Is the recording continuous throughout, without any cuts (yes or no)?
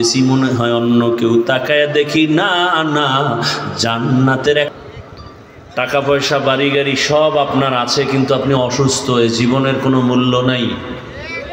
no